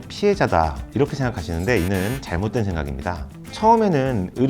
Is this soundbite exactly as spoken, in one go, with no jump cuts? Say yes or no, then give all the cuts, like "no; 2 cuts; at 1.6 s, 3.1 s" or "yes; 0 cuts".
no; 1 cut; at 3.4 s